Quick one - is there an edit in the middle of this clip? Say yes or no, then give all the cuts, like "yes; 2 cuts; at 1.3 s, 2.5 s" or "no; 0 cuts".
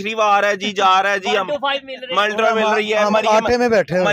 no; 0 cuts